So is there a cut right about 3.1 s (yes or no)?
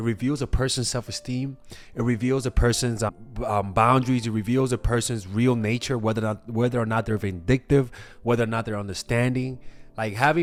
no